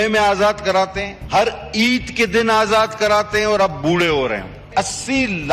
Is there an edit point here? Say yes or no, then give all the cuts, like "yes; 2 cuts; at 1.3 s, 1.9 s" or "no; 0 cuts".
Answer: yes; 2 cuts; at 1.1 s, 4.7 s